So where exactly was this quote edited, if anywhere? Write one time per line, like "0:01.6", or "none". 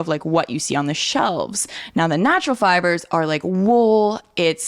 0:01.7